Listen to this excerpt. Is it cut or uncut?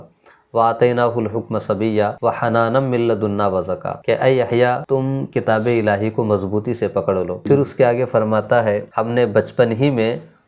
cut